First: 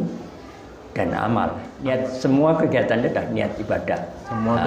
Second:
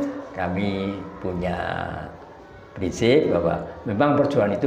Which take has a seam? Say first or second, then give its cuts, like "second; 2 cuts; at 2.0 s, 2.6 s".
first; 1 cut; at 1.7 s